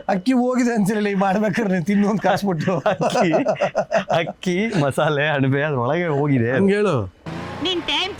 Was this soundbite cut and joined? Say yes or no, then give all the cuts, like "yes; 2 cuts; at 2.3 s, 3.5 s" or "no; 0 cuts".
no; 0 cuts